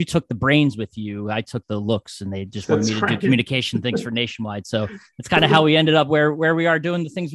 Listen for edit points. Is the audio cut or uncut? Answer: uncut